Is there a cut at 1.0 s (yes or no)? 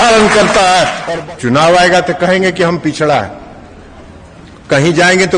yes